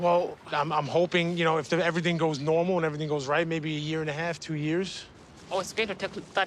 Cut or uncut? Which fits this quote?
uncut